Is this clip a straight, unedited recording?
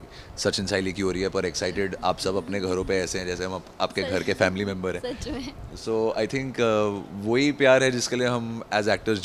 yes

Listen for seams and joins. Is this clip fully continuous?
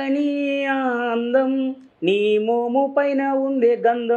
yes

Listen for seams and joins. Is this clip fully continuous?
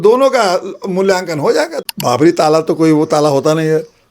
no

